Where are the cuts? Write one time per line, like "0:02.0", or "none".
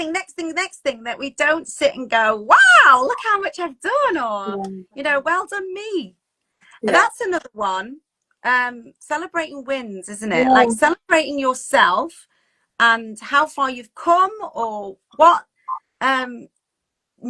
none